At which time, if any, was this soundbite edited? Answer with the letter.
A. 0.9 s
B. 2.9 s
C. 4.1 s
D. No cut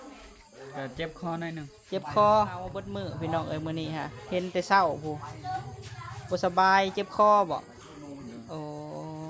B